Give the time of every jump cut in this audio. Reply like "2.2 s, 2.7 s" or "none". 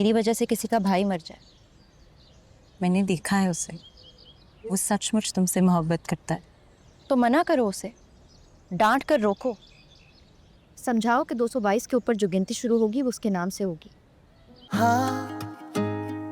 14.5 s